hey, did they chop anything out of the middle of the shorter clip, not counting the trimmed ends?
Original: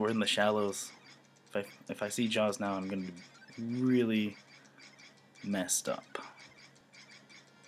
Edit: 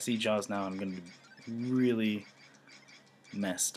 no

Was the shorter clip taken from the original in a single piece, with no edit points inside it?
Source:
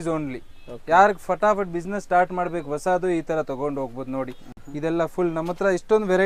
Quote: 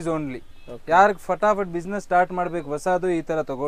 yes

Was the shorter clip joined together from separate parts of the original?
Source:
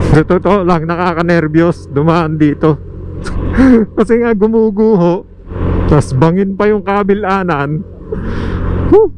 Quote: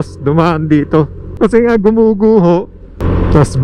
yes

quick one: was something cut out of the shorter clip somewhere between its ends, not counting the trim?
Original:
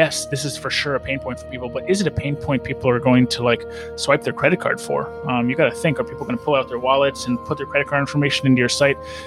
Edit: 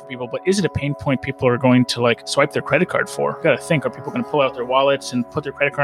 yes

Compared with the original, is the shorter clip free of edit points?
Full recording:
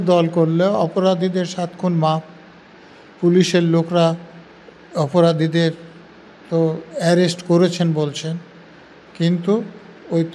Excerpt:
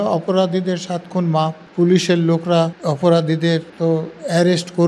no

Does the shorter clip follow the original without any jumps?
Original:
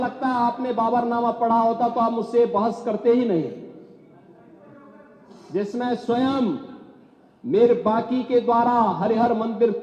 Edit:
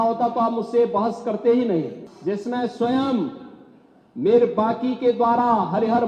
no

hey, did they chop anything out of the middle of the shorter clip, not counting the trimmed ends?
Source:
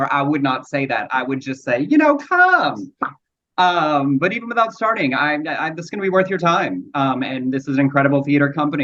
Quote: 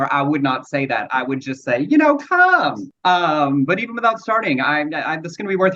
yes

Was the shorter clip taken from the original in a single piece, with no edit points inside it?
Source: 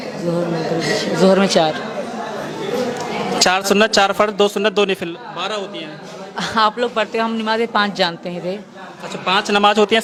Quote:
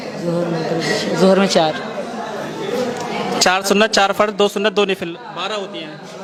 yes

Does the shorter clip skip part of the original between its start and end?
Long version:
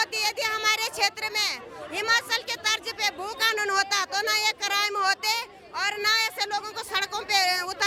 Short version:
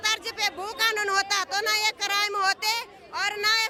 no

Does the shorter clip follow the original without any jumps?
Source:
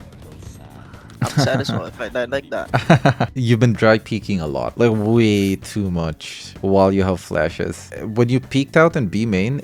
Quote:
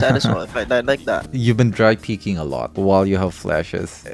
no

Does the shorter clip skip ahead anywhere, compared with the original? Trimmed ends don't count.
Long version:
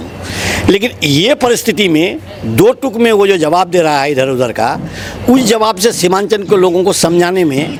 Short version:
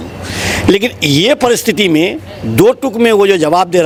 no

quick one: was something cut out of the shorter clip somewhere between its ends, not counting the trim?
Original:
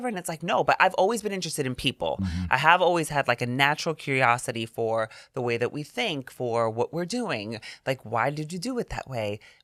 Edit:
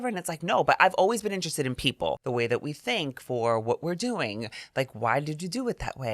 yes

